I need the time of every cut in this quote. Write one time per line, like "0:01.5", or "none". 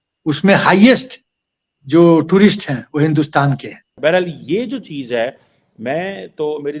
0:03.8